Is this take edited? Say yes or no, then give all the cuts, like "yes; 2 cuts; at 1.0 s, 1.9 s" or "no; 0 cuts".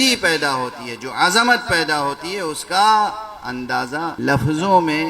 yes; 1 cut; at 4.1 s